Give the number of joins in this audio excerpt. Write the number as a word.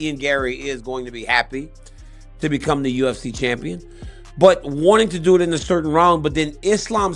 zero